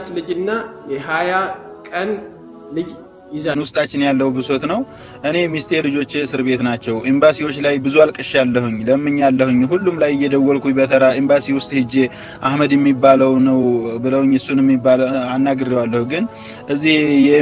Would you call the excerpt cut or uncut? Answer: cut